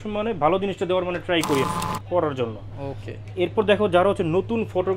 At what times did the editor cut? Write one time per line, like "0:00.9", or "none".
0:01.6